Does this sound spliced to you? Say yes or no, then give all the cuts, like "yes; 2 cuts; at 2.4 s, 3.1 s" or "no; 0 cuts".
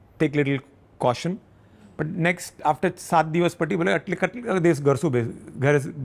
no; 0 cuts